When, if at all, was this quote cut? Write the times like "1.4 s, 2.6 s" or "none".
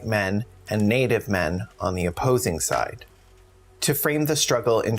1.7 s